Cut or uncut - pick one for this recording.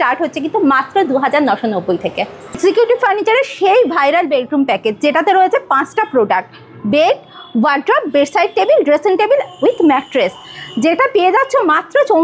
uncut